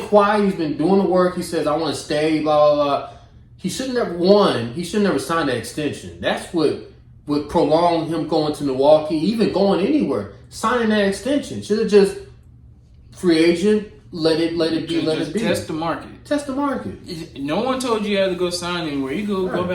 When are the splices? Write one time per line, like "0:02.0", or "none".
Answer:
none